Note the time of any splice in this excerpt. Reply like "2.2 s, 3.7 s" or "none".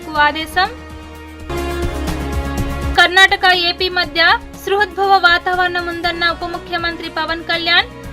1.4 s, 2.9 s